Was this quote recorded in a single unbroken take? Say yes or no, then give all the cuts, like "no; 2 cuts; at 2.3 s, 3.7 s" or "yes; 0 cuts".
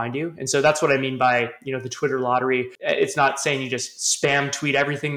no; 1 cut; at 2.7 s